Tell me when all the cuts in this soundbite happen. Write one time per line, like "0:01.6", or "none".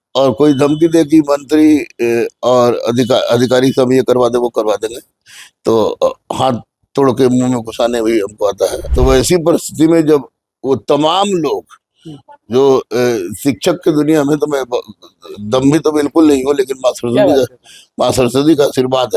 0:08.8